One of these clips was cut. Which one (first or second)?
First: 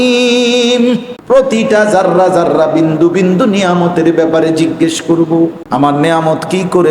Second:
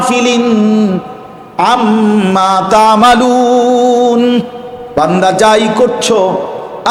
first